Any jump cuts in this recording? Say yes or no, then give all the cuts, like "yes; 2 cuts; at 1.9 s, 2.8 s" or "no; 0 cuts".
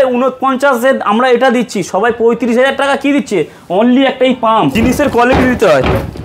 yes; 1 cut; at 4.7 s